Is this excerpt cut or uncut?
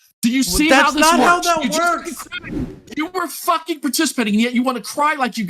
cut